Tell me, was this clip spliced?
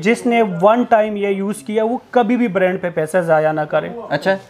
no; 0 cuts

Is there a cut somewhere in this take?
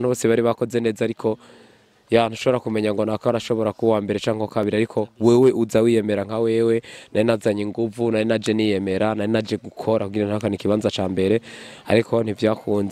no; 0 cuts

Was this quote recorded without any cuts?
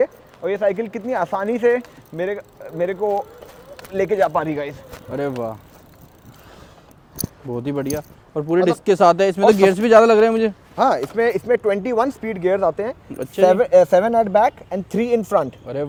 yes; 0 cuts

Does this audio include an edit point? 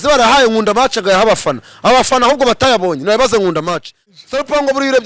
yes; 1 cut; at 4.0 s

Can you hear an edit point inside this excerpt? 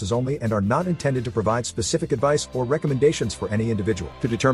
no; 0 cuts

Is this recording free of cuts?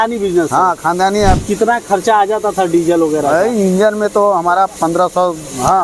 no; 2 cuts; at 1.4 s, 4.7 s

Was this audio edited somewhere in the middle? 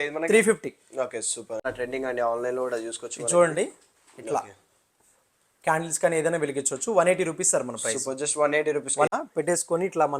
yes; 2 cuts; at 1.6 s, 9.1 s

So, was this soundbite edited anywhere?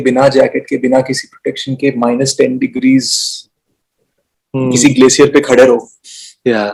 no; 0 cuts

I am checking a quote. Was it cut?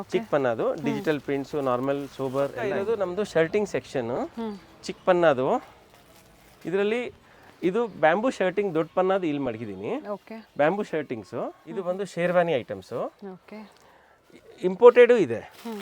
yes; 2 cuts; at 2.8 s, 11.7 s

